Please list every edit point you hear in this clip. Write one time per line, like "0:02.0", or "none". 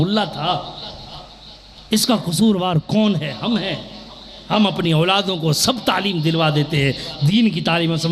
none